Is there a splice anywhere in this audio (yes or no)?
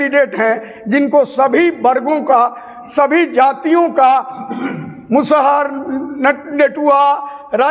no